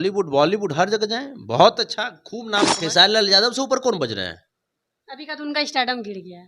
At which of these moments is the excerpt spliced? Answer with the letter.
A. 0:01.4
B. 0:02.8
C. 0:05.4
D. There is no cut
B